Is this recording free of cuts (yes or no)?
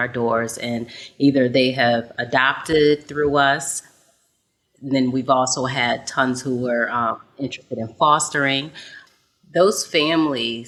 yes